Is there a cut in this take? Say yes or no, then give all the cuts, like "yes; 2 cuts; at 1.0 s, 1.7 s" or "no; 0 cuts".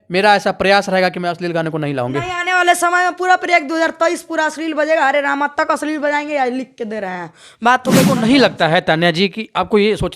yes; 1 cut; at 8.1 s